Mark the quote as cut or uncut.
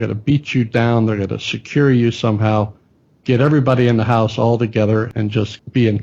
cut